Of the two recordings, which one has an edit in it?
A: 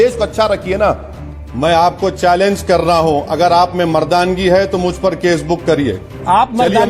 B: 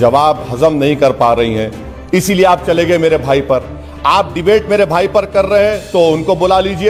A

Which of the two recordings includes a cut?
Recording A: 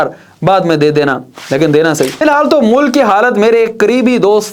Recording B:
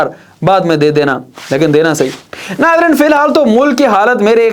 A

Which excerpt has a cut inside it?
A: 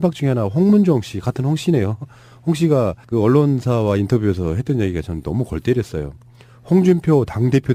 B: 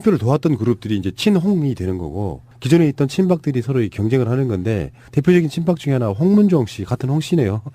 B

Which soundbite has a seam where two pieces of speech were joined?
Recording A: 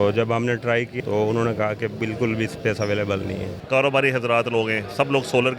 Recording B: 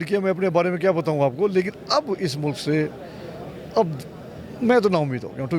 A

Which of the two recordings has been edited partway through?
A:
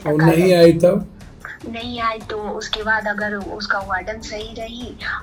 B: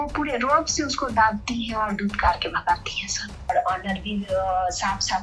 B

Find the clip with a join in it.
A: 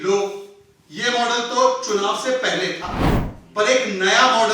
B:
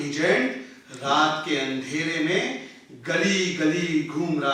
A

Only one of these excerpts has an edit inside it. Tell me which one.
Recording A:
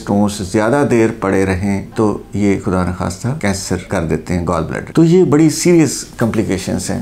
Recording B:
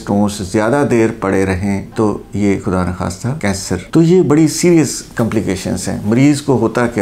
B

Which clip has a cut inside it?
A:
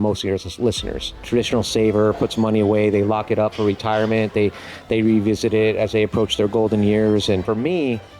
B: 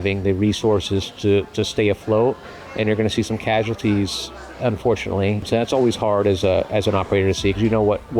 A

